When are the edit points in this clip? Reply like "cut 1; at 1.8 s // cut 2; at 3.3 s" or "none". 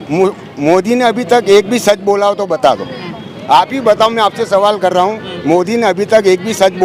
none